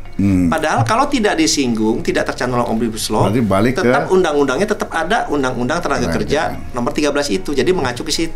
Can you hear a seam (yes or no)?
no